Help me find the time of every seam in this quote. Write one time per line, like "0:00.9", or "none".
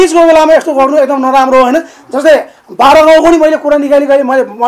none